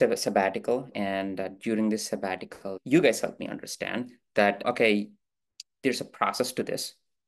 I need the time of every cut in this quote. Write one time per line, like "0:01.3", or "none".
0:00.9
0:02.8

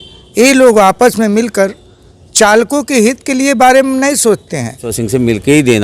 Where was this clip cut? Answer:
0:04.9

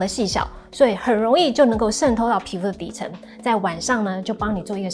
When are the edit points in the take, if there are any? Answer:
none

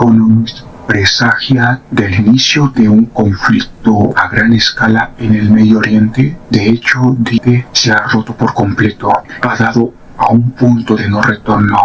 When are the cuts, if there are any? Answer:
0:07.4
0:09.3

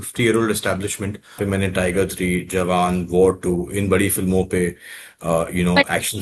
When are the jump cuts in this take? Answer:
0:01.4

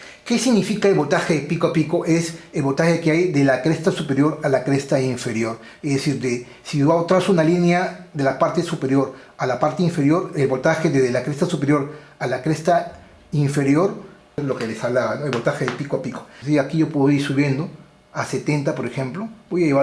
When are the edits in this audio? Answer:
0:14.4
0:16.3

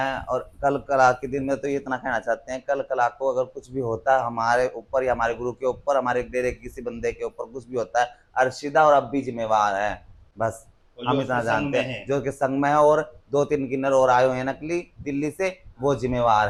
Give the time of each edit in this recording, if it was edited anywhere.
none

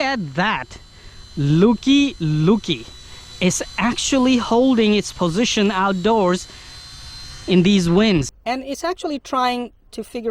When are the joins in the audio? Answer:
0:08.3

